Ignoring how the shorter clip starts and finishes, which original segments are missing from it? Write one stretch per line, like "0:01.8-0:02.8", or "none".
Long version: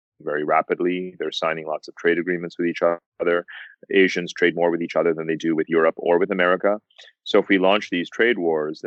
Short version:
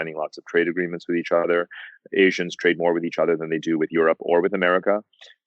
0:02.9-0:03.2